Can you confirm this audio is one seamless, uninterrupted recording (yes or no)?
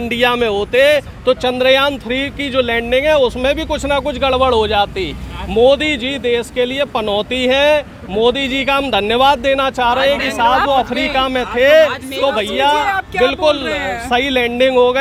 yes